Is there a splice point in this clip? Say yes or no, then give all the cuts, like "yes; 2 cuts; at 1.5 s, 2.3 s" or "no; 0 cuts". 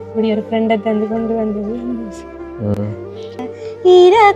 yes; 1 cut; at 3.4 s